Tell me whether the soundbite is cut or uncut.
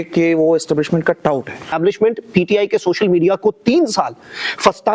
cut